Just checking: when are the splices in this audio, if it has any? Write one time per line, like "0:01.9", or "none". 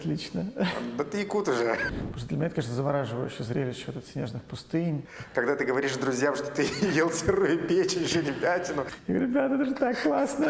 0:01.8
0:05.2
0:08.9

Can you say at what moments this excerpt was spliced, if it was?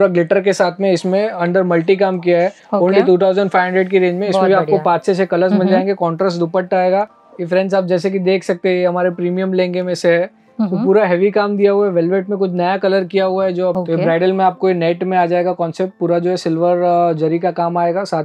0:07.1
0:13.8

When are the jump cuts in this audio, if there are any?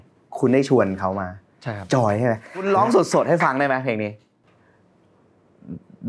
0:02.6

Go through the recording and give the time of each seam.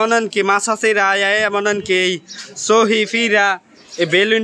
none

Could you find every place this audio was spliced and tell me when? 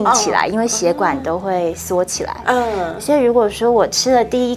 none

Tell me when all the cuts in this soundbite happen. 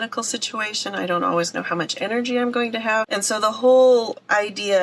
0:03.1

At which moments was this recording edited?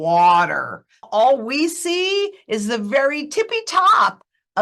0:01.1

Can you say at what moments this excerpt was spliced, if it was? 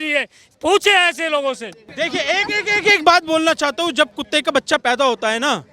0:01.8

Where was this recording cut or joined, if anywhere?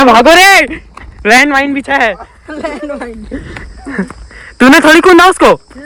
none

